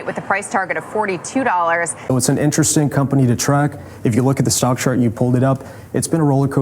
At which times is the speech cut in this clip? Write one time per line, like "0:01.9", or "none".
0:02.0